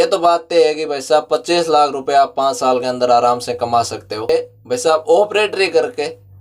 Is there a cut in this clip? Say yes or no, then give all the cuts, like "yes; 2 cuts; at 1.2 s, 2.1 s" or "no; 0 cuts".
yes; 1 cut; at 4.3 s